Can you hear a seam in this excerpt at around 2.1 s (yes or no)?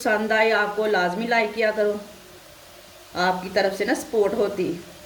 no